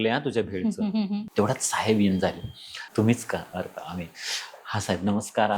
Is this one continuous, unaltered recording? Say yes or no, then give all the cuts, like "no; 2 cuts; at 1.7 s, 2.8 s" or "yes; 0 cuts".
no; 2 cuts; at 1.3 s, 2.8 s